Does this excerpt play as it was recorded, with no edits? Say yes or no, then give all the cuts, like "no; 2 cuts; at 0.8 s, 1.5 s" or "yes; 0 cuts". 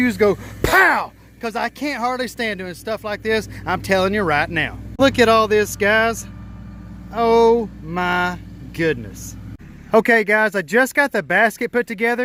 yes; 0 cuts